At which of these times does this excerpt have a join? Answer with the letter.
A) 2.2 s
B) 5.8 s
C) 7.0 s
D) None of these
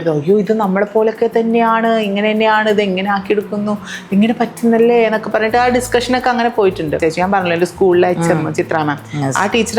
C